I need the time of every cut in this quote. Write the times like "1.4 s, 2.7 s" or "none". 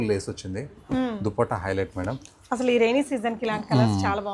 none